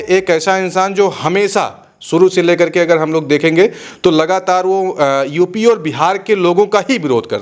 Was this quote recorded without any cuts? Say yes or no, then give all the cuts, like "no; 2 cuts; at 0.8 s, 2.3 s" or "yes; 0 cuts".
yes; 0 cuts